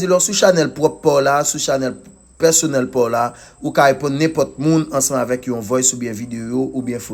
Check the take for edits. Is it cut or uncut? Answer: uncut